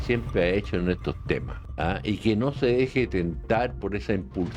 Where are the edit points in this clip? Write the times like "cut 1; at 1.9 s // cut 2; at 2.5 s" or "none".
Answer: cut 1; at 1.6 s